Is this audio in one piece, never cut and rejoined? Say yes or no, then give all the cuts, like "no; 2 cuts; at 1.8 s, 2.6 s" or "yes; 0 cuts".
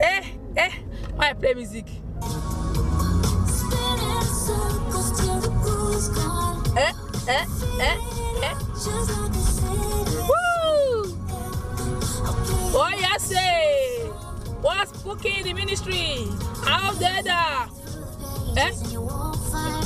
yes; 0 cuts